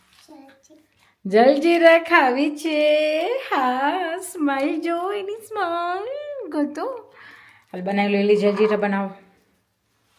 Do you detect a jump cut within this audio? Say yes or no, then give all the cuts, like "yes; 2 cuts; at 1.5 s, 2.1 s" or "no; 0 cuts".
no; 0 cuts